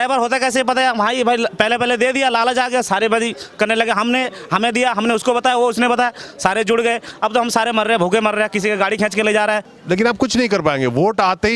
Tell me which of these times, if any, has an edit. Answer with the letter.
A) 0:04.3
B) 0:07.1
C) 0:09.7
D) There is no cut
C